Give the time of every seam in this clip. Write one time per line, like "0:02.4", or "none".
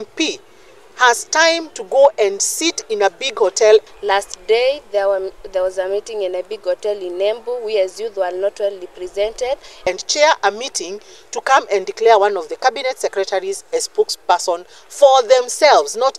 0:03.8
0:09.8